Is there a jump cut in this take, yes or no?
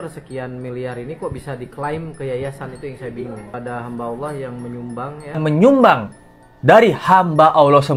yes